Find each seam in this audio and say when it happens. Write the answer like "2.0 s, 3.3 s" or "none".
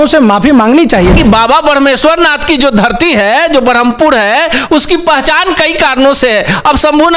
1.1 s